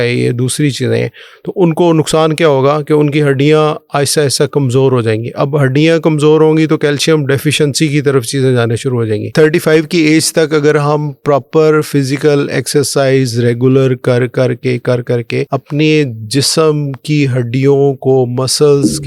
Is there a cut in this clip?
yes; 2 cuts; at 9.3 s, 15.5 s

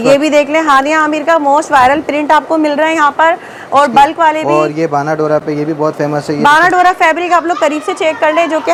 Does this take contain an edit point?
no; 0 cuts

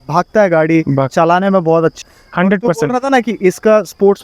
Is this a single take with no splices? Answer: no; 1 cut; at 2.0 s

